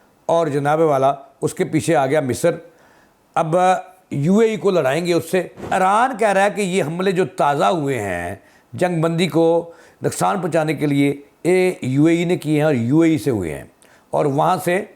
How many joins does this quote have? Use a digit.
1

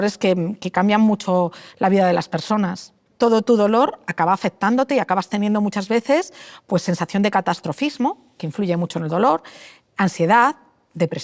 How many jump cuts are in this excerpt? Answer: 1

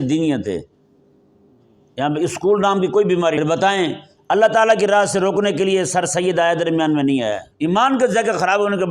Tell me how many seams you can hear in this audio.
2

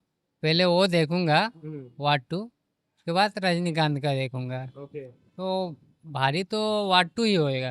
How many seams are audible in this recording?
0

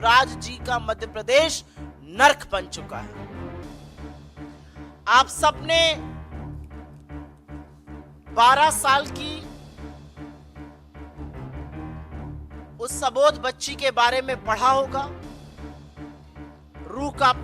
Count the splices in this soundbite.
2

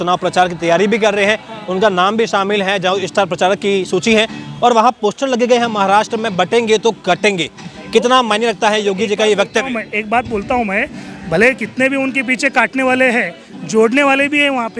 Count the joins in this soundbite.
0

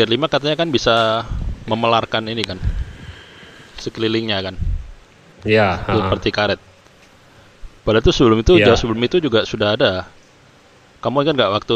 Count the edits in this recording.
0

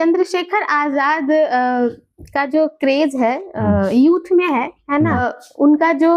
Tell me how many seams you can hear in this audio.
1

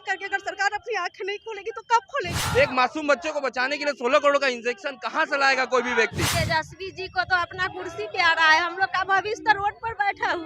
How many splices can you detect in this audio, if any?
2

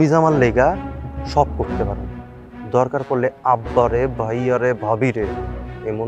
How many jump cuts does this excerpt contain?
0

